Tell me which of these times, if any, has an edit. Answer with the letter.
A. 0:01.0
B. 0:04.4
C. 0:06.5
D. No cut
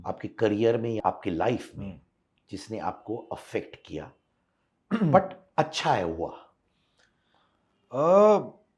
A